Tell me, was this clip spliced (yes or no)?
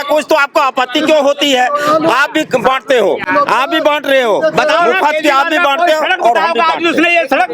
no